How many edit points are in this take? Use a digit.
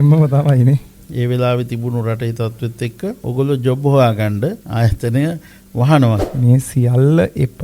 4